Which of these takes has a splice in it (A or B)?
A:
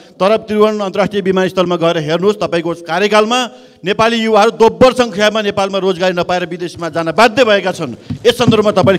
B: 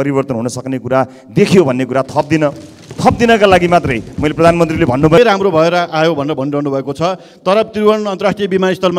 B